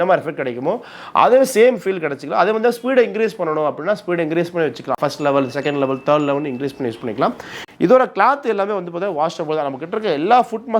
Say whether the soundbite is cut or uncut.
cut